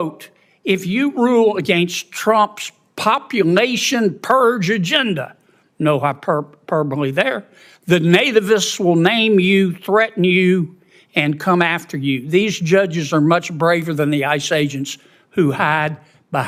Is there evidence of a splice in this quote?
no; 0 cuts

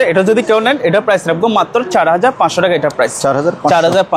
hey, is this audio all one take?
yes; 0 cuts

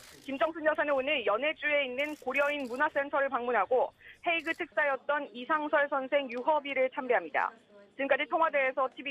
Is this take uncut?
no; 1 cut; at 6.1 s

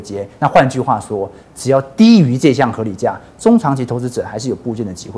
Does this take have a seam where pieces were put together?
no; 0 cuts

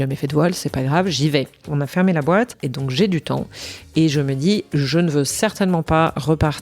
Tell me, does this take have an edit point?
yes; 2 cuts; at 1.6 s, 2.6 s

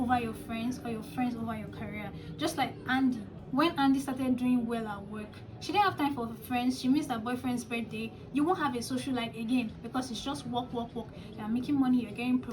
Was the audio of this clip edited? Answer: no; 0 cuts

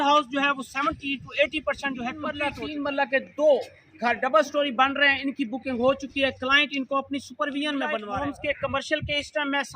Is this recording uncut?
no; 2 cuts; at 2.3 s, 8.0 s

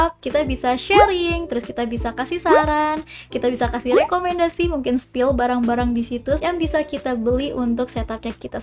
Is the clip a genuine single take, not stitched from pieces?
yes; 0 cuts

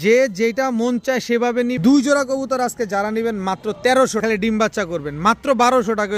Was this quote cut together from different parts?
yes; 2 cuts; at 1.8 s, 4.2 s

